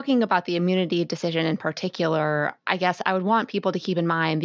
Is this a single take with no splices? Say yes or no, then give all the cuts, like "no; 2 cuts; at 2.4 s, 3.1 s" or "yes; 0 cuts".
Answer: yes; 0 cuts